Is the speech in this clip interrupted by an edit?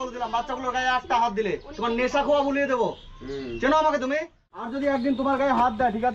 yes; 1 cut; at 4.7 s

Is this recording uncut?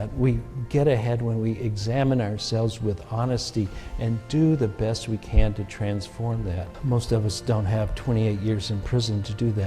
no; 1 cut; at 6.7 s

